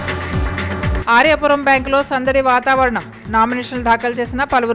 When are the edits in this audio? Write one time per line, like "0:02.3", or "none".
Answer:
0:01.0